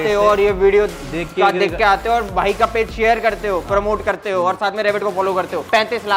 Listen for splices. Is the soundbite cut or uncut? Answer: uncut